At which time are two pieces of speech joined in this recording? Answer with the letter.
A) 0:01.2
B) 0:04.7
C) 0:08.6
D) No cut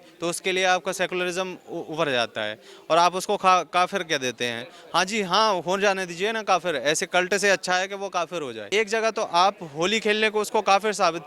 C